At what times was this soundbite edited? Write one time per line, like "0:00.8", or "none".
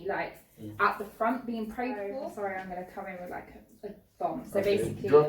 0:02.2